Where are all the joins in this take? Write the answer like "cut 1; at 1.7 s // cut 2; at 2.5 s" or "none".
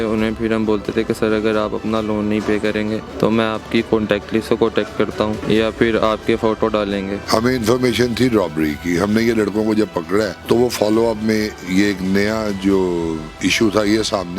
cut 1; at 3.1 s // cut 2; at 5.4 s // cut 3; at 7.2 s // cut 4; at 10.4 s

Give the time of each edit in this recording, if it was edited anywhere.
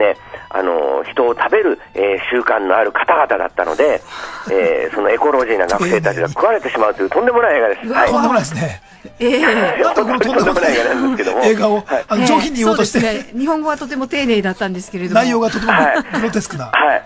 cut 1; at 7.0 s

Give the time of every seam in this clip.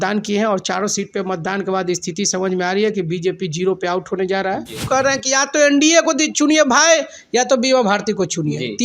cut 1; at 4.9 s

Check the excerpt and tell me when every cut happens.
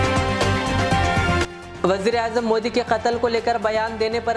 cut 1; at 1.3 s

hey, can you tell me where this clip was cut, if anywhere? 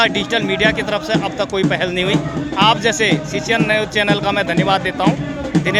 none

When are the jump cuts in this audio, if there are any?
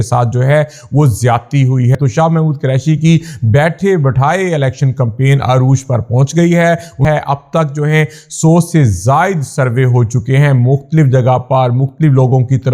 cut 1; at 1.9 s // cut 2; at 7.0 s

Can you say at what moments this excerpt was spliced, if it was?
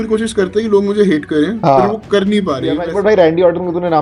cut 1; at 2.8 s

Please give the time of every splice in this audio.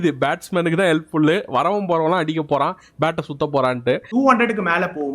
cut 1; at 4.1 s

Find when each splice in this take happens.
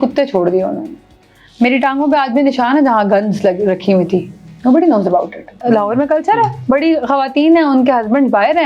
cut 1; at 5.6 s

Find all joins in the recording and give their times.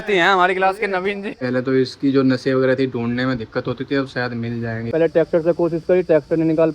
cut 1; at 1.3 s // cut 2; at 4.8 s

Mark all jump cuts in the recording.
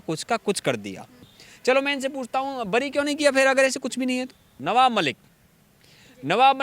cut 1; at 1.3 s // cut 2; at 4.5 s

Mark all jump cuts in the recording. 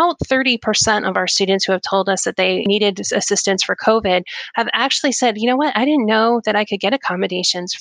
cut 1; at 2.7 s

